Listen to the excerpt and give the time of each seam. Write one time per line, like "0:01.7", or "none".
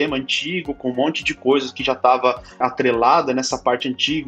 0:02.6